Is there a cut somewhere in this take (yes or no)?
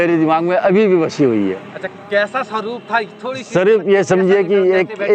no